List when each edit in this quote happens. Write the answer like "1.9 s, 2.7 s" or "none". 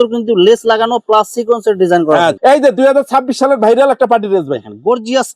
2.4 s